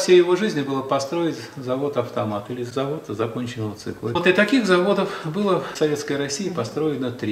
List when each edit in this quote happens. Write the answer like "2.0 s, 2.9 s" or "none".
2.7 s, 4.2 s, 5.7 s